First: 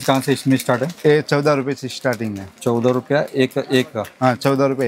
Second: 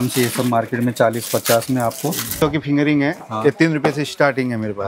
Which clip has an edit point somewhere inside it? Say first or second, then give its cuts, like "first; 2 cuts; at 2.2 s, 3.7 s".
second; 1 cut; at 2.3 s